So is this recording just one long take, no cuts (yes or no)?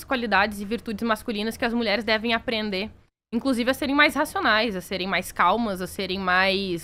yes